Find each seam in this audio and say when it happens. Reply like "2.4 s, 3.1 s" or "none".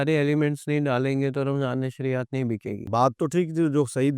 2.8 s

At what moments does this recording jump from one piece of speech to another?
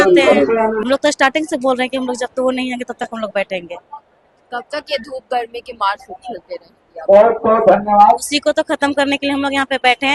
none

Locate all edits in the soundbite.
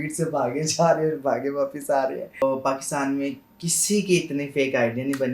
2.4 s

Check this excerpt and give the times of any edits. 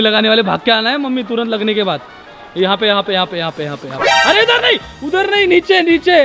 none

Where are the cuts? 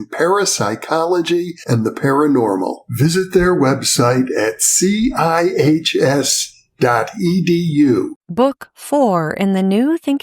8.2 s

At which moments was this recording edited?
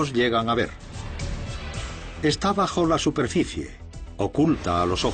3.3 s

